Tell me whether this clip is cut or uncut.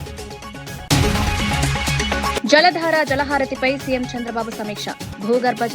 cut